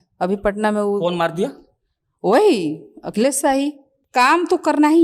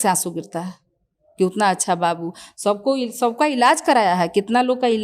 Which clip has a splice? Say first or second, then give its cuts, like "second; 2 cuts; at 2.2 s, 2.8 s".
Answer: first; 1 cut; at 3.9 s